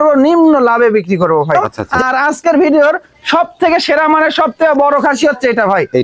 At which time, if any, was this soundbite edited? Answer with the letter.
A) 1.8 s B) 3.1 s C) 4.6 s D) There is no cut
A